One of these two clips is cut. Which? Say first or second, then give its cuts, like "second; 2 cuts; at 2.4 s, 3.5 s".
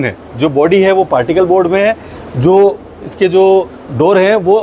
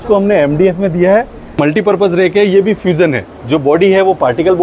second; 1 cut; at 1.6 s